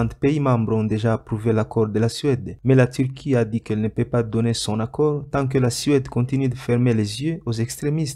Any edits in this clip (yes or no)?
no